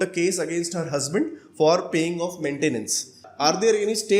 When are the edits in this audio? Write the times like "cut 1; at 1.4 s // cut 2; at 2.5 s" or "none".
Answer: cut 1; at 3.3 s